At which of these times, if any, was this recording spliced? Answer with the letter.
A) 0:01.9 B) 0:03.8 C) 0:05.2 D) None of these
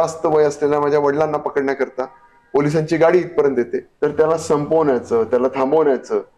B